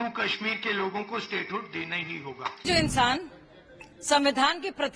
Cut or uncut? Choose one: cut